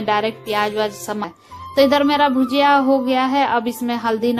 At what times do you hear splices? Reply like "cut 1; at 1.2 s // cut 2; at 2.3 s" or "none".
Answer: cut 1; at 1.3 s